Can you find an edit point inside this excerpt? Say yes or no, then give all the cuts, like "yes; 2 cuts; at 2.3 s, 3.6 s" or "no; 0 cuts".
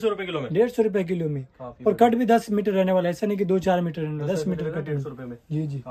no; 0 cuts